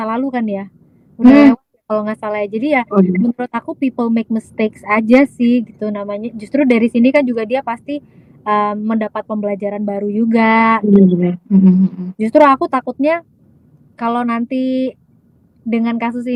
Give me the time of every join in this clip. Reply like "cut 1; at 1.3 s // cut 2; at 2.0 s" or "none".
none